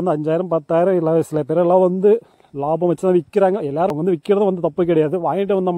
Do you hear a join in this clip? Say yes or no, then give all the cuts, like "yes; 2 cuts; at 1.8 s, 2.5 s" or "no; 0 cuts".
yes; 1 cut; at 3.9 s